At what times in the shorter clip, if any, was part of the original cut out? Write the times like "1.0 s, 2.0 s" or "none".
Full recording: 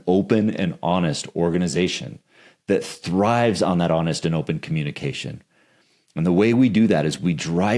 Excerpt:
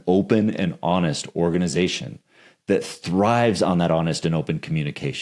none